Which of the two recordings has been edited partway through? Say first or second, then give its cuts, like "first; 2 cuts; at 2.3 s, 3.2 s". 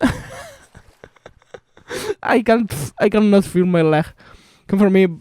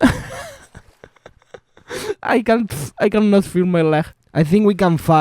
second; 1 cut; at 4.2 s